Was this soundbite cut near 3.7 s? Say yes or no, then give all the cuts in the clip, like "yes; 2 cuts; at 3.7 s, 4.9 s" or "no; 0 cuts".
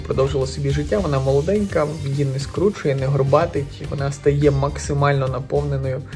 no; 0 cuts